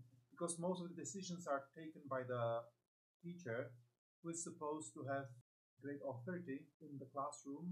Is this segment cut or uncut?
cut